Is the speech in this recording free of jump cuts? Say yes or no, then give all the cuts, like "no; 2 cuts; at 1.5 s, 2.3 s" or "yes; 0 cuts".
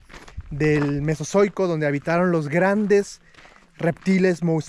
yes; 0 cuts